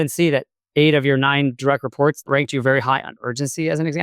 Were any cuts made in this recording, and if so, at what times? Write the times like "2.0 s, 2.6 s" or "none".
2.2 s